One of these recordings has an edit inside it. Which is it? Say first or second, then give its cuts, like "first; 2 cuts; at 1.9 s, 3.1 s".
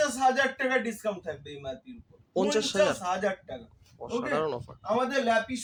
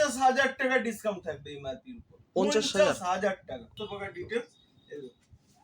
second; 1 cut; at 3.8 s